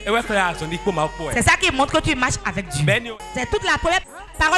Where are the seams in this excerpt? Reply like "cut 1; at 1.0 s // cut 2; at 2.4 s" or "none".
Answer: cut 1; at 3.0 s